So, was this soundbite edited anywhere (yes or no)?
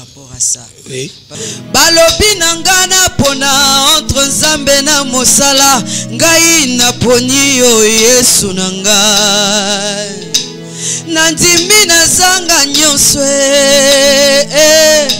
yes